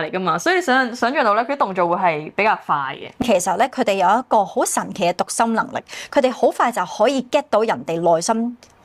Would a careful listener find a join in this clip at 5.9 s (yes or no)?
no